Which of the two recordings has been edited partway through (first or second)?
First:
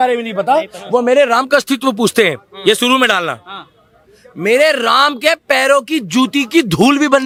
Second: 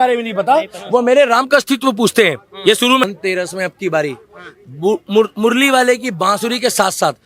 second